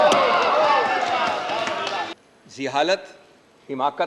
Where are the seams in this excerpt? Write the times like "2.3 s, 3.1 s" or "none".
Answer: 2.2 s